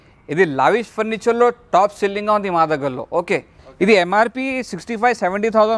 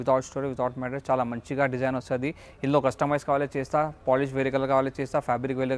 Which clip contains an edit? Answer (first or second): first